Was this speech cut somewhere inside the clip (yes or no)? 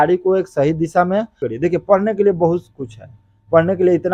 yes